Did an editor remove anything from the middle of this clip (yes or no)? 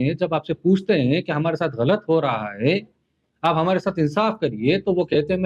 no